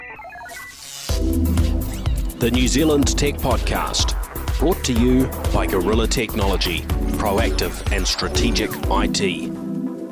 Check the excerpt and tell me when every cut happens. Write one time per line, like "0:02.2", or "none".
none